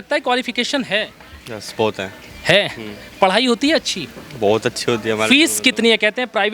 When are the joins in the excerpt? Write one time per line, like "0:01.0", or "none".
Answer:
none